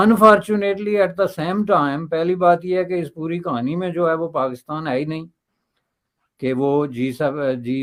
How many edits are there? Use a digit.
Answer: 0